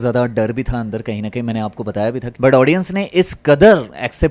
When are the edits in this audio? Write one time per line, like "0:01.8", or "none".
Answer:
0:02.3